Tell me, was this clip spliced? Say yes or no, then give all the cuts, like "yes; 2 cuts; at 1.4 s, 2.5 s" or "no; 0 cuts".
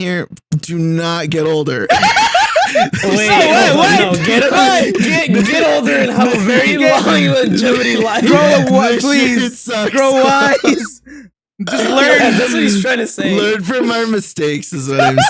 no; 0 cuts